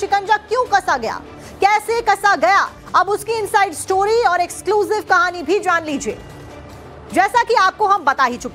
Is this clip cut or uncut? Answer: uncut